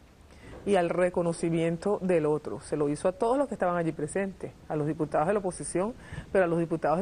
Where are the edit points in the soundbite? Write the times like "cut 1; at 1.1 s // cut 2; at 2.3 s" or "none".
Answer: none

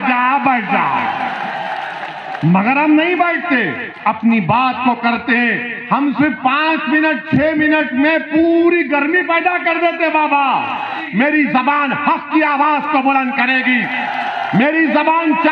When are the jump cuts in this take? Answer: cut 1; at 11.0 s

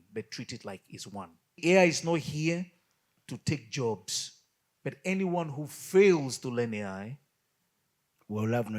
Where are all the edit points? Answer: cut 1; at 1.6 s

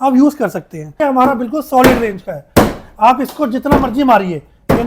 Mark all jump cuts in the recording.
cut 1; at 1.0 s

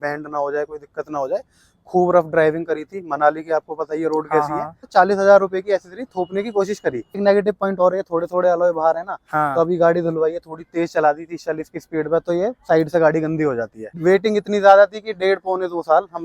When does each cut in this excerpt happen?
cut 1; at 4.9 s // cut 2; at 7.2 s // cut 3; at 13.8 s

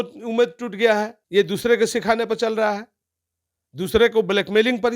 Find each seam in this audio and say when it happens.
cut 1; at 1.2 s

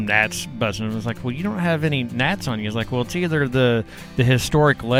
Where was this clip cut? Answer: none

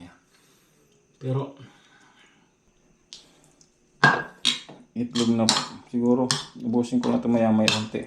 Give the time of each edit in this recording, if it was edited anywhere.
cut 1; at 2.7 s

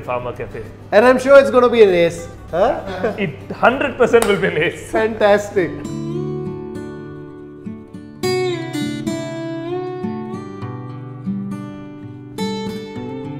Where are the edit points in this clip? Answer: none

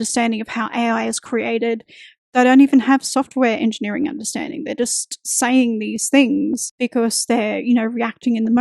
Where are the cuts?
cut 1; at 6.7 s

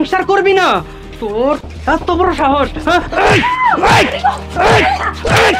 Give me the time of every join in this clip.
none

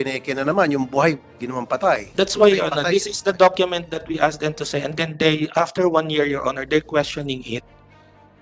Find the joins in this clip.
none

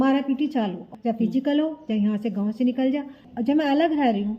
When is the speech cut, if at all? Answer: cut 1; at 0.9 s // cut 2; at 3.2 s

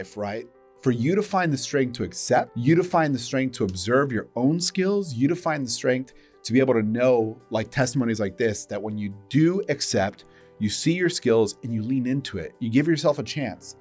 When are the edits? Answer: cut 1; at 2.5 s

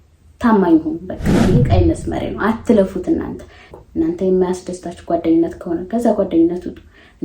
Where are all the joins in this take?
cut 1; at 3.7 s

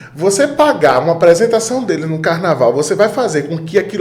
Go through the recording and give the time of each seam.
none

